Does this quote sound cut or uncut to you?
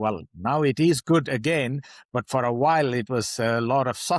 uncut